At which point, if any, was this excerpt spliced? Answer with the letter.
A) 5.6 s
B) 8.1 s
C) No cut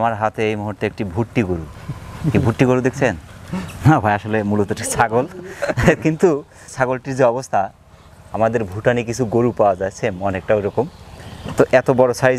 C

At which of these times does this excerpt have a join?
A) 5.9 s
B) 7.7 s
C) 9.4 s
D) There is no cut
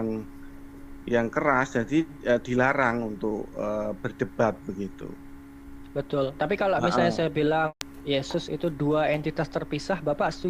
B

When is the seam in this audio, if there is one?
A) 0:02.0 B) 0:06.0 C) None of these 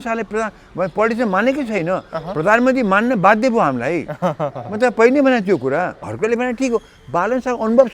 B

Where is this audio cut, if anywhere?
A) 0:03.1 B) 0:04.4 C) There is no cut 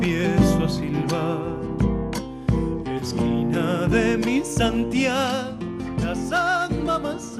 C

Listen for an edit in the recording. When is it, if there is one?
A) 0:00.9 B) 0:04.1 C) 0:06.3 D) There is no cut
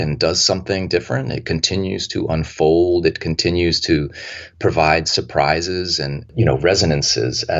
C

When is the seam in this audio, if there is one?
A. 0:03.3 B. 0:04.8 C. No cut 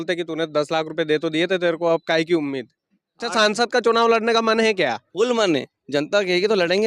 A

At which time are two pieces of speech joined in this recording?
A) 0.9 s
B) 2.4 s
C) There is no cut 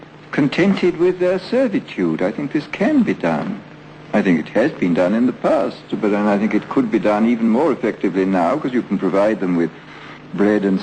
A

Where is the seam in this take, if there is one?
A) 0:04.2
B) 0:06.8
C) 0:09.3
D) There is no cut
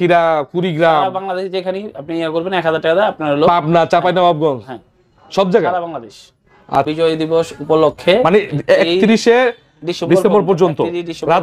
B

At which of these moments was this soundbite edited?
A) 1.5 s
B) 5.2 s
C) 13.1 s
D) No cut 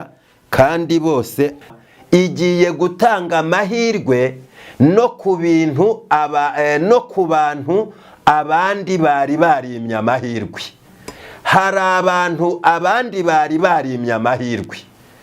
A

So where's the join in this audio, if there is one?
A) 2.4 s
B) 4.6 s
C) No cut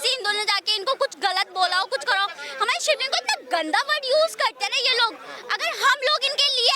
A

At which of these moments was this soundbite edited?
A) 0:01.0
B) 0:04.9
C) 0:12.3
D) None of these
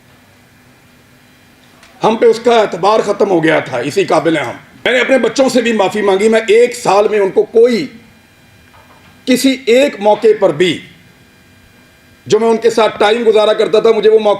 B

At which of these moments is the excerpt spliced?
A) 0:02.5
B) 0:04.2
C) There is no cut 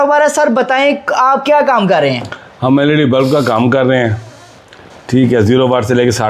C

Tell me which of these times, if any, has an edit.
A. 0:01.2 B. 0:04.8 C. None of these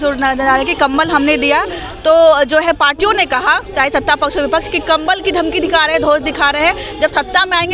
C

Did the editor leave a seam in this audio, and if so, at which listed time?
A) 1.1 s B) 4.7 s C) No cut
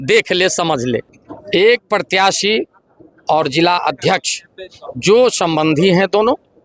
A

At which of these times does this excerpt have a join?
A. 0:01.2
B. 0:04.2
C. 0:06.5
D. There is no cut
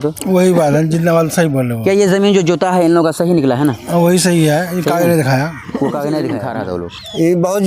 C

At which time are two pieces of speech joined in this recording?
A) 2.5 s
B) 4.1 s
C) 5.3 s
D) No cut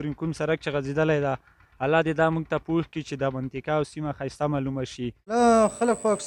C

